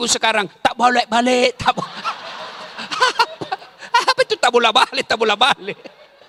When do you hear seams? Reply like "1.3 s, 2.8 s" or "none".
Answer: none